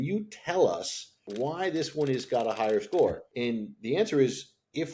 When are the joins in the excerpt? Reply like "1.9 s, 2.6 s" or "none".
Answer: 1.2 s